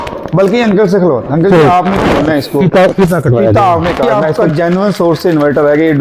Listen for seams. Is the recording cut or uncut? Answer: cut